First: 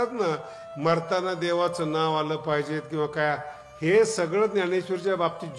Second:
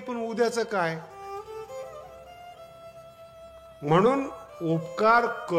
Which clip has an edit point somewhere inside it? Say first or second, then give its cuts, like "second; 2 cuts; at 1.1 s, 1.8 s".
second; 2 cuts; at 1.0 s, 3.1 s